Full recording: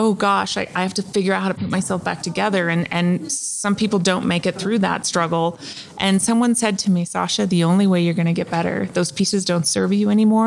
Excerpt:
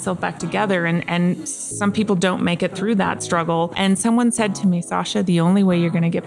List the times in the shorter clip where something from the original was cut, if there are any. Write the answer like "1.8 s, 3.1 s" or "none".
3.7 s